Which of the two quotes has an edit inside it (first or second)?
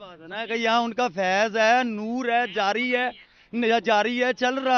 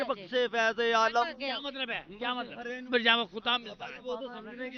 second